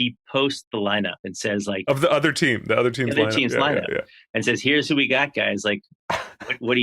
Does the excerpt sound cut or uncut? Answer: cut